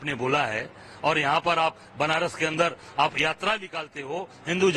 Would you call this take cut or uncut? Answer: uncut